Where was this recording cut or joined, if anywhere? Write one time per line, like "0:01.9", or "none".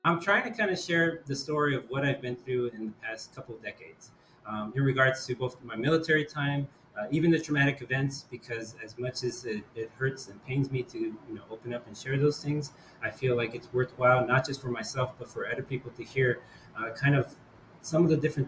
none